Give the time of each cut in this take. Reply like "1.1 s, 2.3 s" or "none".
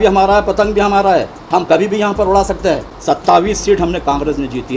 2.9 s